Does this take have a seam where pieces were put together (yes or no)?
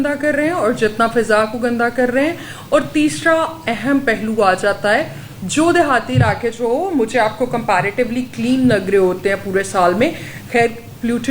no